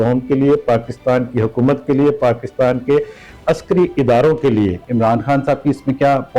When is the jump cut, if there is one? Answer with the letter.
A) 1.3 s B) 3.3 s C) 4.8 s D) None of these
C